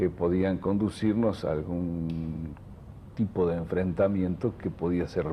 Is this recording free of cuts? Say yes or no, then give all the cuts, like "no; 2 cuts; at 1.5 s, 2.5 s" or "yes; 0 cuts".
no; 1 cut; at 2.0 s